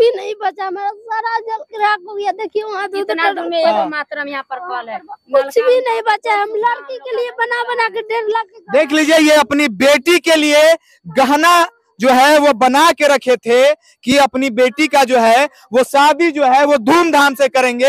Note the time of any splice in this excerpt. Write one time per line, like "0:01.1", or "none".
none